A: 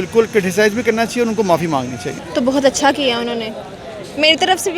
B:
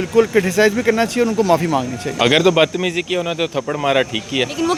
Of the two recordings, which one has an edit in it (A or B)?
A